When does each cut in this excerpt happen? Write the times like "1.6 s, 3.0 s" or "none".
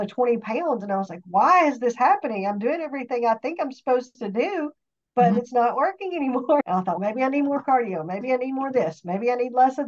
6.6 s